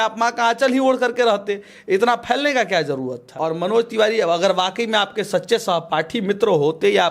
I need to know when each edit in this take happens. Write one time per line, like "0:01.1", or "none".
0:03.3